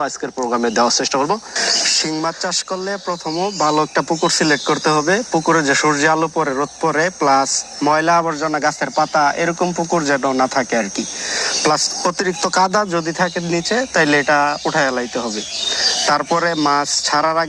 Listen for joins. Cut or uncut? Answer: uncut